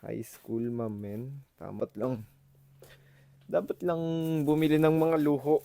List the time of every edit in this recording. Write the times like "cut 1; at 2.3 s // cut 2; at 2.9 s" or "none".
cut 1; at 1.8 s